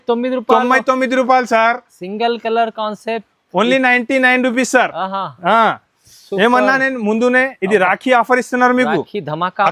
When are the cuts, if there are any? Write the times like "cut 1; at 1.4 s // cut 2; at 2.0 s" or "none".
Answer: none